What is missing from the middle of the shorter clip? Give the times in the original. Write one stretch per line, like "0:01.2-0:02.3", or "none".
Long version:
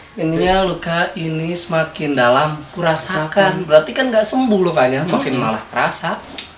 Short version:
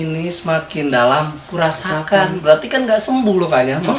none